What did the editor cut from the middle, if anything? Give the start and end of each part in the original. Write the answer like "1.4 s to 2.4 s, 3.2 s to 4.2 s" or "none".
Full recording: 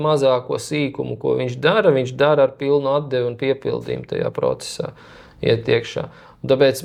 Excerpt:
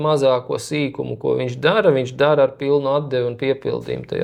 none